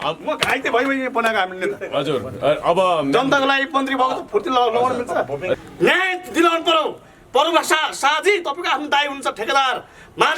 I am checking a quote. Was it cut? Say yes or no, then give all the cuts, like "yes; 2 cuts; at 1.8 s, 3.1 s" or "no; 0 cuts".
yes; 1 cut; at 5.6 s